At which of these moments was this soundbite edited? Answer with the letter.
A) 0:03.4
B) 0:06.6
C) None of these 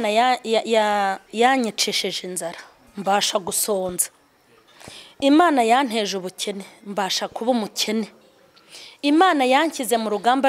C